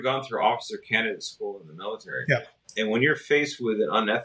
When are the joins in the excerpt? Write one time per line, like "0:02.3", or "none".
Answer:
0:02.6